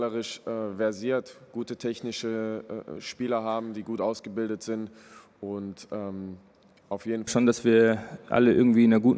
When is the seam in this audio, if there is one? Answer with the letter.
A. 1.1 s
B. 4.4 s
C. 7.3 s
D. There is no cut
C